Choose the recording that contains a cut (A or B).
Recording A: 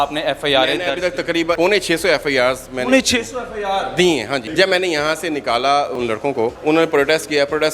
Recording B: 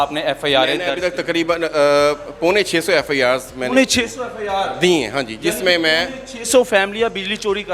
A